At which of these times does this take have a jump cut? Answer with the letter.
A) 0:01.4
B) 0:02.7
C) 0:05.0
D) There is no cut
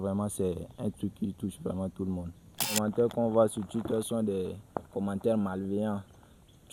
B